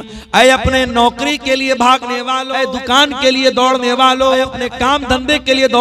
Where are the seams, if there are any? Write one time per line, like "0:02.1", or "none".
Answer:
0:02.5
0:04.5